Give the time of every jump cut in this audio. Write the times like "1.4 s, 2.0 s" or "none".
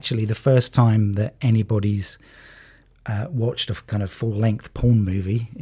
none